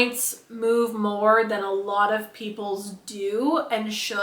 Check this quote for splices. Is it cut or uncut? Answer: uncut